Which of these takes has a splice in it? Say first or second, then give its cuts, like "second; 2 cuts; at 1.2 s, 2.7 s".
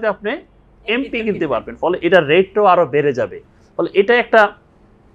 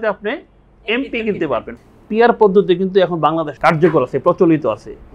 second; 2 cuts; at 1.7 s, 3.5 s